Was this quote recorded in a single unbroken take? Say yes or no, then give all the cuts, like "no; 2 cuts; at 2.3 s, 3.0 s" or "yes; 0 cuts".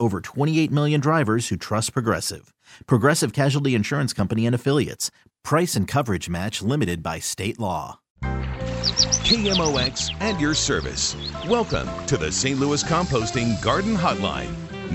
no; 1 cut; at 8.4 s